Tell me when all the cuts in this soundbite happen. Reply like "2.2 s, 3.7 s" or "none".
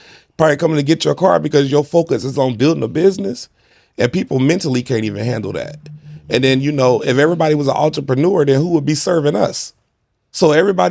none